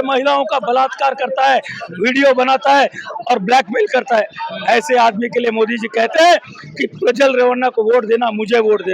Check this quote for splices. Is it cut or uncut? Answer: uncut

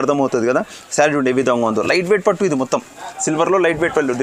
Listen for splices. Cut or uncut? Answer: uncut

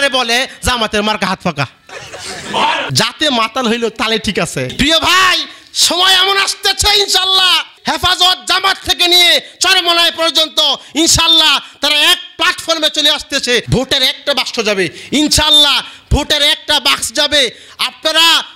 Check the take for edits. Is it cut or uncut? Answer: cut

